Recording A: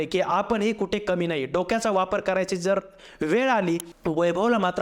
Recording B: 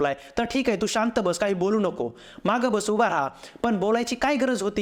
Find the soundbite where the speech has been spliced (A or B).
A